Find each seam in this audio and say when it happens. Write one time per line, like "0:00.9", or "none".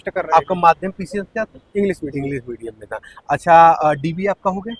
none